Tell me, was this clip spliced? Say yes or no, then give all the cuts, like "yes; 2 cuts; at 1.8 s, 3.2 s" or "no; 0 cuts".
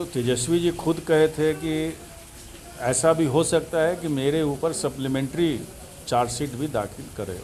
no; 0 cuts